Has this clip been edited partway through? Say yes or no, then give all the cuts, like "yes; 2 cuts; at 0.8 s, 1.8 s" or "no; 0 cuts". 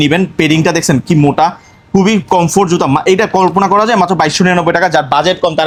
no; 0 cuts